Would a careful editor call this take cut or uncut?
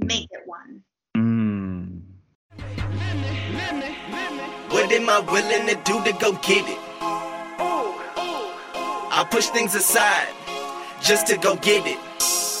cut